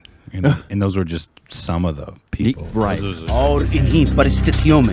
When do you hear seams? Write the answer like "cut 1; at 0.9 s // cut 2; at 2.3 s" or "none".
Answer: cut 1; at 3.2 s